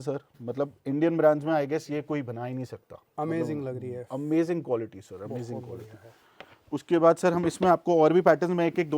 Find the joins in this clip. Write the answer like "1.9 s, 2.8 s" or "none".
none